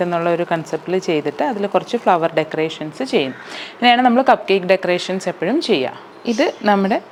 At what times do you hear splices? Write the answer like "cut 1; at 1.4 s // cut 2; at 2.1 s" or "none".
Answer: none